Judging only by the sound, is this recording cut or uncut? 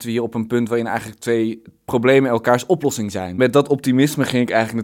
cut